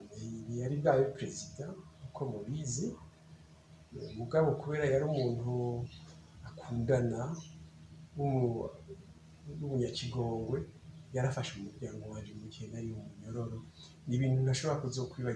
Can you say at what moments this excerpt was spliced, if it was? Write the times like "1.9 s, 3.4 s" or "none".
none